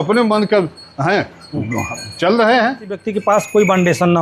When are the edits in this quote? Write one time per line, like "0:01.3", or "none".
0:03.1